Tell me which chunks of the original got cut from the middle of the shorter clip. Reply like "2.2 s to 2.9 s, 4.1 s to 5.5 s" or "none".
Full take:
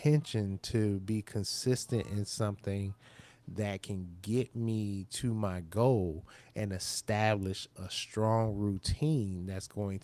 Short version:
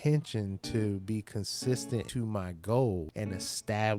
2.1 s to 5.2 s, 6.2 s to 6.5 s